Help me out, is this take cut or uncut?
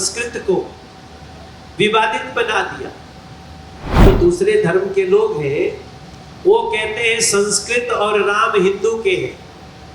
cut